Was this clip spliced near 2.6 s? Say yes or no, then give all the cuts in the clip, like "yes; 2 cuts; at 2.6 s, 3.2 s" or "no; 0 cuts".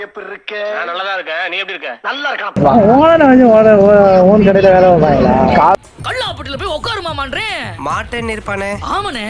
yes; 1 cut; at 2.6 s